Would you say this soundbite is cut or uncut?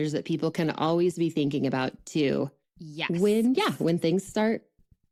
uncut